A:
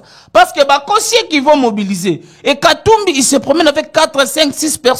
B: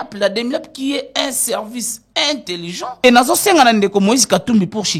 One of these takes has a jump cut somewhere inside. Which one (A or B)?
B